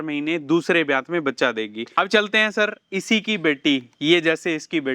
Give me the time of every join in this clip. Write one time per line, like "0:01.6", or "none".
0:01.8

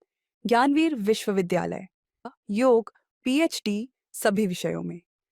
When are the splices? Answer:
0:02.2

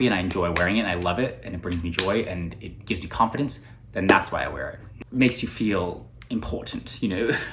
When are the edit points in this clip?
0:05.0

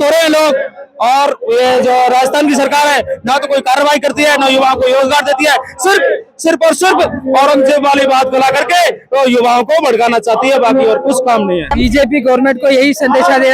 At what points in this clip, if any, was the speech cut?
0:11.7

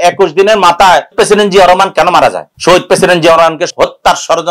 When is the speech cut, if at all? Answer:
0:02.5
0:03.7

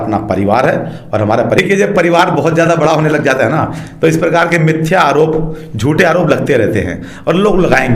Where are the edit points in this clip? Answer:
0:01.6

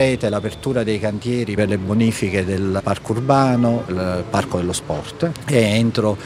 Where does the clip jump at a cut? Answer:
0:01.6

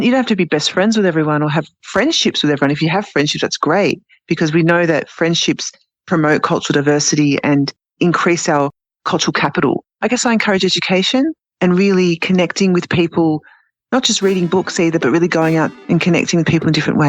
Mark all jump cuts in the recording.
0:09.9
0:11.5

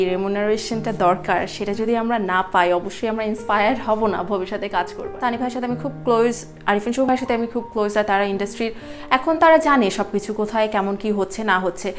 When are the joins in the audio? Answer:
0:05.0

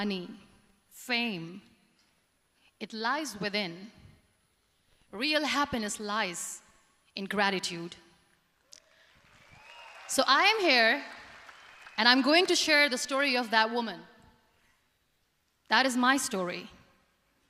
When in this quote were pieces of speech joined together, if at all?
none

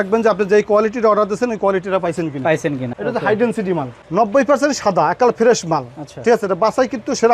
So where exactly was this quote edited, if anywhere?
0:02.9

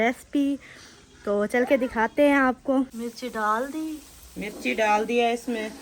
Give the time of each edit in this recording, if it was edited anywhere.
0:03.0

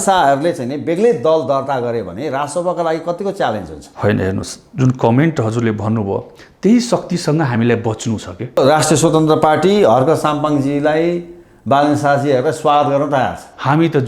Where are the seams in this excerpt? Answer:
0:08.6

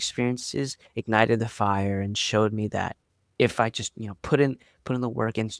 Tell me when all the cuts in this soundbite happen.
0:03.2

